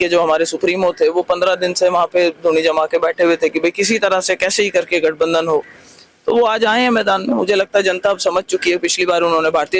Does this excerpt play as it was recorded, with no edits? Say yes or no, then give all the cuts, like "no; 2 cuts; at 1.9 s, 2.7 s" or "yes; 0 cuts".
yes; 0 cuts